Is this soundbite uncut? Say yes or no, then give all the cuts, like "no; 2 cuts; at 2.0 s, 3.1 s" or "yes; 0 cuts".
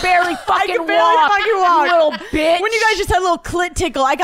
yes; 0 cuts